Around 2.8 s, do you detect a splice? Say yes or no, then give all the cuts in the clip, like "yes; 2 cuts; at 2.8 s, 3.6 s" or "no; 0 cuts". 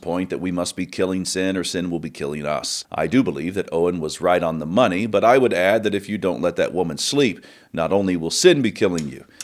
yes; 1 cut; at 2.8 s